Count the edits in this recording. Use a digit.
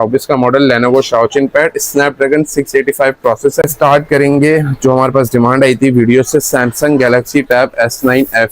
1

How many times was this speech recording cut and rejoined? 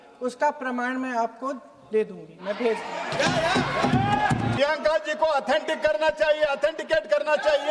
1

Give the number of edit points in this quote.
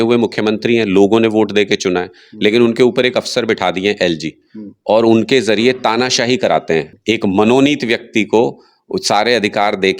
1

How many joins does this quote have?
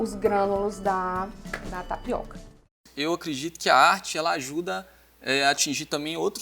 1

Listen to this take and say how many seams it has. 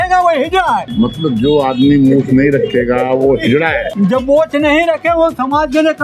2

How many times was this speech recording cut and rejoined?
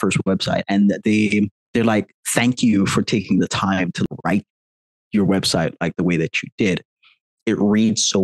2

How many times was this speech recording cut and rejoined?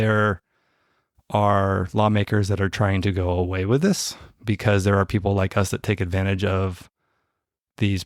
0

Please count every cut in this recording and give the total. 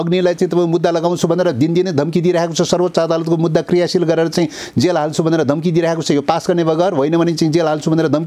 0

